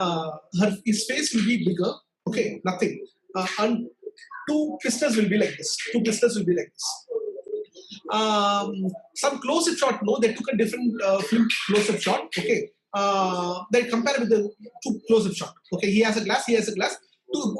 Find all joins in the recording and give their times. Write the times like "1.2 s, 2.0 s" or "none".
none